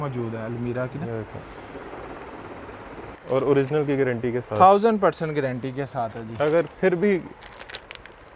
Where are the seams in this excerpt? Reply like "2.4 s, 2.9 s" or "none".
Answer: 3.1 s